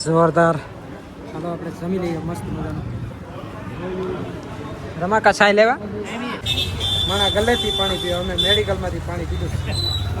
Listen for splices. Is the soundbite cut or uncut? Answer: cut